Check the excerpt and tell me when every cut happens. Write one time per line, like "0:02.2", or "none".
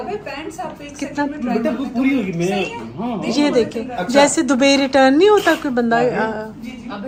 none